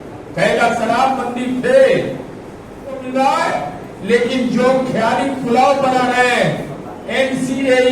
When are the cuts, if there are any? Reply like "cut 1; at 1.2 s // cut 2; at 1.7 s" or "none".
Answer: cut 1; at 3.0 s